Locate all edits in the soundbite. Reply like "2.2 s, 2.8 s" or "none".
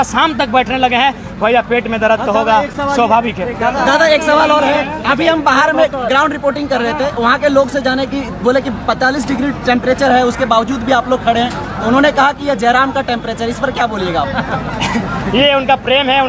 none